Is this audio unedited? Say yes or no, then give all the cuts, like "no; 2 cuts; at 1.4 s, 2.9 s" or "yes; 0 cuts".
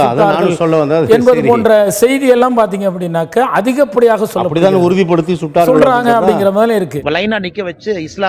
yes; 0 cuts